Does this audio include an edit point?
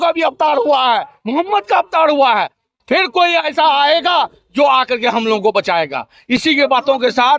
no; 0 cuts

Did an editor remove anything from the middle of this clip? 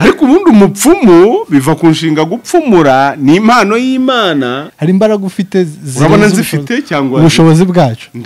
yes; 1 cut; at 4.7 s

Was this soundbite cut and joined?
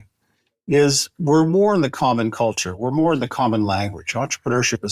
no; 0 cuts

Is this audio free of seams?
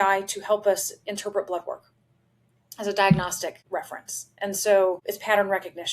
no; 2 cuts; at 3.5 s, 5.0 s

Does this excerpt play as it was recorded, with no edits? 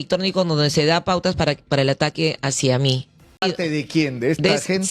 no; 1 cut; at 3.4 s

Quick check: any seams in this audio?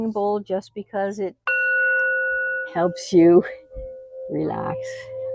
no; 0 cuts

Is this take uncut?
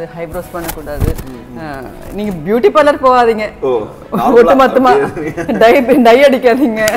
yes; 0 cuts

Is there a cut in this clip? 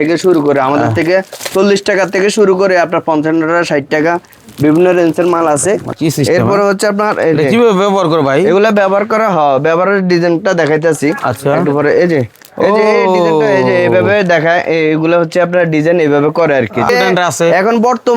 yes; 2 cuts; at 5.9 s, 16.9 s

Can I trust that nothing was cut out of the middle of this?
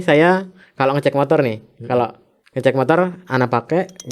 yes; 0 cuts

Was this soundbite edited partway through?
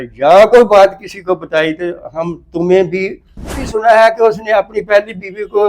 yes; 1 cut; at 3.6 s

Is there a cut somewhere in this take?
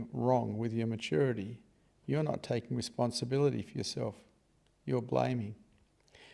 no; 0 cuts

